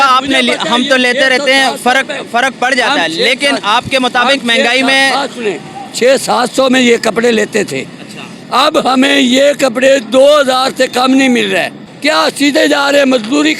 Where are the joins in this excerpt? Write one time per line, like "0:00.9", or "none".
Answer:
0:11.8